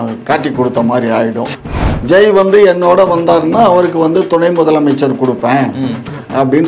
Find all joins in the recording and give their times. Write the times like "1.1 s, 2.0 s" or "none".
1.5 s